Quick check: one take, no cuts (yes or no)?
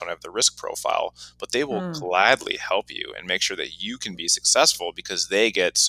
yes